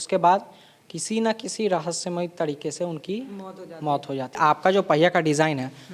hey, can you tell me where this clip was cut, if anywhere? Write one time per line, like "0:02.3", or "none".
0:04.4